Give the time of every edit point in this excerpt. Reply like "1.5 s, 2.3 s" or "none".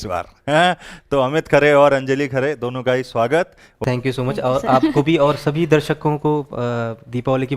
3.8 s